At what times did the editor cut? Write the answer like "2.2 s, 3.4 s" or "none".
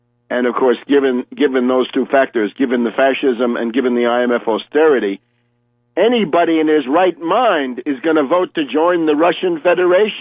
3.8 s